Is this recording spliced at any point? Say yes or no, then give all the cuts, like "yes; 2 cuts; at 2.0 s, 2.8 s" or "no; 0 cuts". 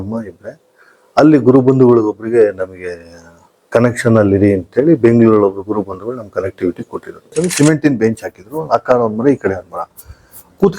yes; 1 cut; at 7.2 s